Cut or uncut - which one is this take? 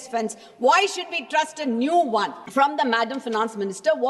cut